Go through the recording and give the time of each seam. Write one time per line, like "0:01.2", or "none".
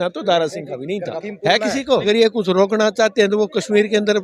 0:01.3
0:02.0

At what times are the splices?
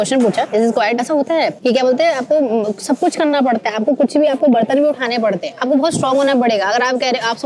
none

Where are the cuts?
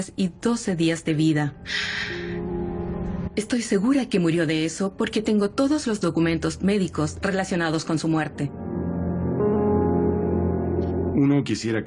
0:04.1

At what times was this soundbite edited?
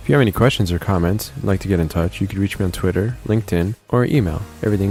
none

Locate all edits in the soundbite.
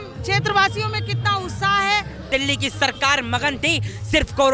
0:02.3

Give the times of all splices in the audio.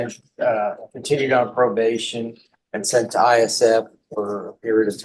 none

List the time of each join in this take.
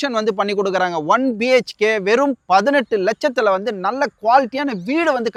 none

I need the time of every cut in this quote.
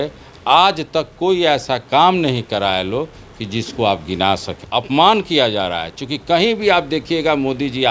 0:04.5

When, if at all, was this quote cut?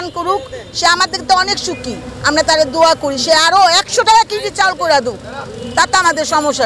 none

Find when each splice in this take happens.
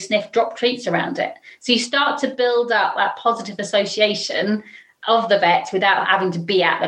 none

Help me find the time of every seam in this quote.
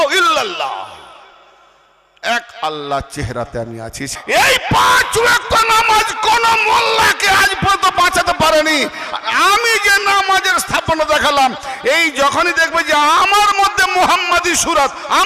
0:04.1

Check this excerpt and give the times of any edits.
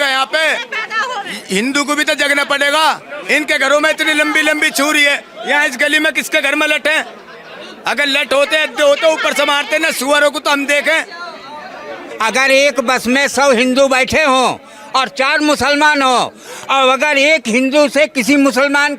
0:12.1

